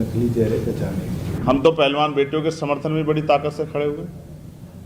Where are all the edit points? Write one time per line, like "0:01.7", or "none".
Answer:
0:01.2

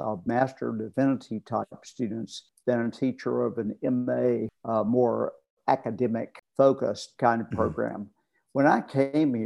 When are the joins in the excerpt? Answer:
0:02.4
0:04.6
0:06.4

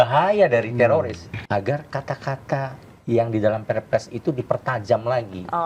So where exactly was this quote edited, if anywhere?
0:01.2

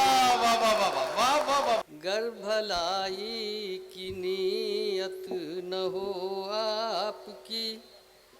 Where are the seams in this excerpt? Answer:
0:01.8

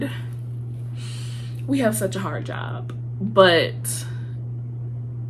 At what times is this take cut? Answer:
none

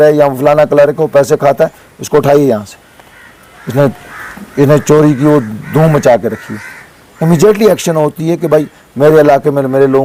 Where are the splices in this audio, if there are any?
none

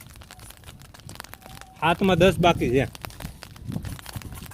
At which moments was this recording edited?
none

